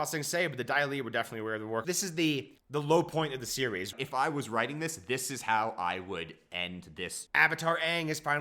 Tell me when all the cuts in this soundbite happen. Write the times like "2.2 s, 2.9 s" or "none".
1.8 s, 3.9 s, 7.2 s